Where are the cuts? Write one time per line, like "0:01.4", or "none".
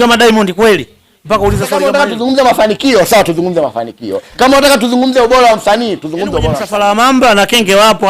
0:01.7
0:06.6